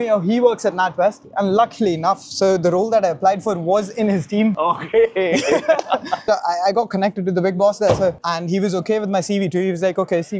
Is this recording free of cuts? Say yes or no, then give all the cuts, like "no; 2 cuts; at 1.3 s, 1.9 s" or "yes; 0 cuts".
no; 3 cuts; at 1.2 s, 6.2 s, 8.2 s